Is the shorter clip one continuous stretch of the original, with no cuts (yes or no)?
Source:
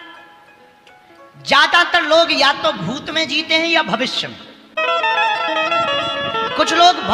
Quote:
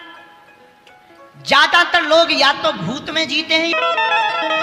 no